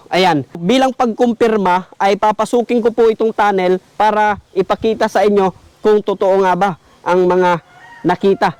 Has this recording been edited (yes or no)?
no